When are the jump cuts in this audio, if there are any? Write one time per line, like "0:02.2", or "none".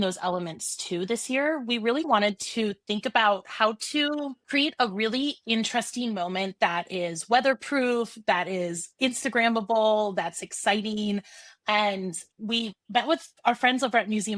0:02.1
0:13.4